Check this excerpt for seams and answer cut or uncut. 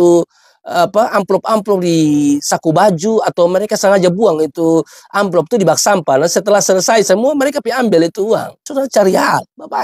uncut